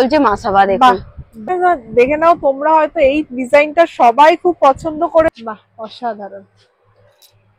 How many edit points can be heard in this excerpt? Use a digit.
2